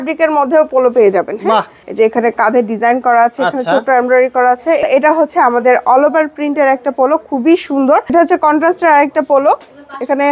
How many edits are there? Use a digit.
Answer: 3